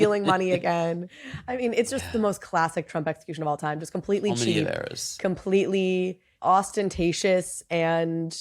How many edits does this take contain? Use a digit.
2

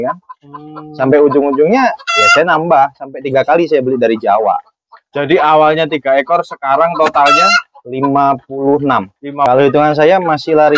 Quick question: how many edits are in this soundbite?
1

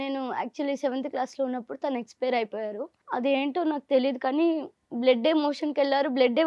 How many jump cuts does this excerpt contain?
1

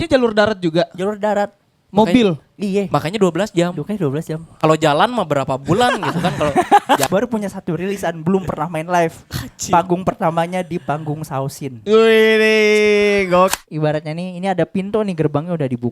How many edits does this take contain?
2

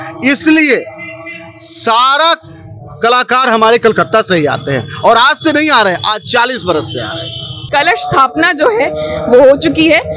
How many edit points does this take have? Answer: 1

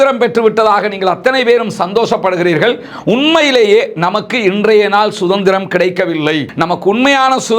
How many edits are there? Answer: 1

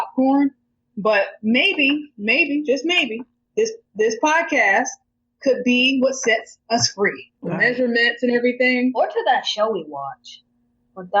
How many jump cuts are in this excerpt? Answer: 1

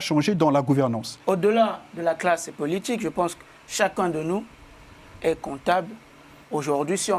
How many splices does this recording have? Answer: 1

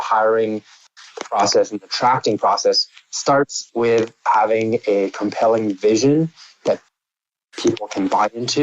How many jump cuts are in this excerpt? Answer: 1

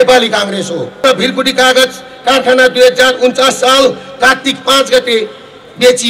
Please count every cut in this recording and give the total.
1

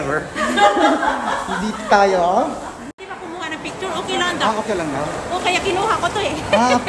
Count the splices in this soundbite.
1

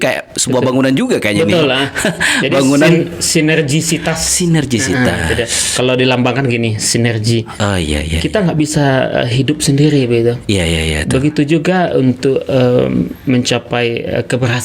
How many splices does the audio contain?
0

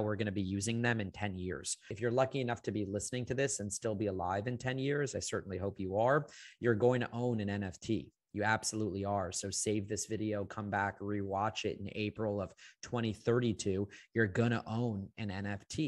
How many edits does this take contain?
1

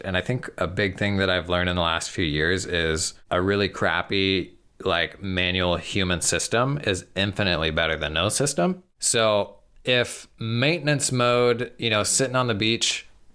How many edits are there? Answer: 2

